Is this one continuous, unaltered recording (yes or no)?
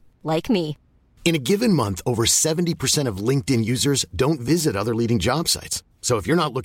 yes